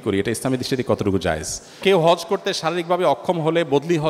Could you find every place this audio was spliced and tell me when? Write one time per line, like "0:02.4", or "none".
0:01.8